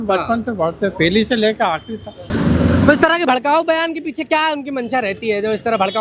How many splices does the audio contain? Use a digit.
1